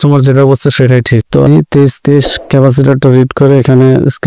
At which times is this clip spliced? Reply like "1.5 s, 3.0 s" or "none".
1.5 s